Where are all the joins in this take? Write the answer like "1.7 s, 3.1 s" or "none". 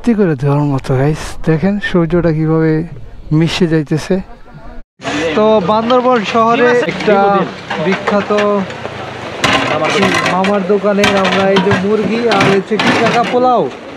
4.9 s, 6.9 s

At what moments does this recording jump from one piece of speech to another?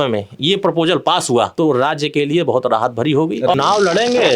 1.5 s, 3.5 s

